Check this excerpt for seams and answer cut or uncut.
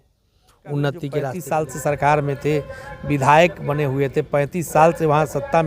cut